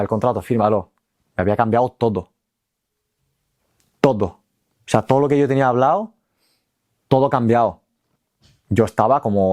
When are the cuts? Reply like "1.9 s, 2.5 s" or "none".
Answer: none